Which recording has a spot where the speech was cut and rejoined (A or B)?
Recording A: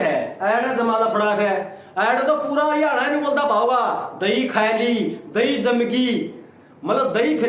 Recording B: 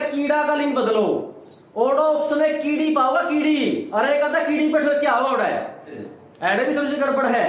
B